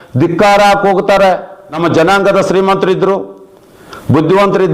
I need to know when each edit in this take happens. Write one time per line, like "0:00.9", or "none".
0:01.8